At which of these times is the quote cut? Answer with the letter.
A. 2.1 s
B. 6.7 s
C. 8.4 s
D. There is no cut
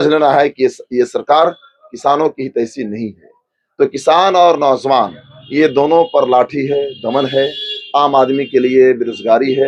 D